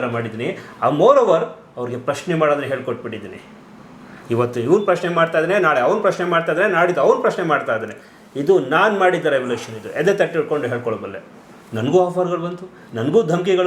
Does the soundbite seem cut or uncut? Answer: uncut